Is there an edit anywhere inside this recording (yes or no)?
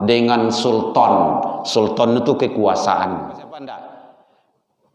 yes